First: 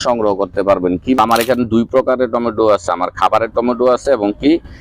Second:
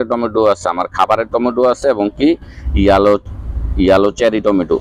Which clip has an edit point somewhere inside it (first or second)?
first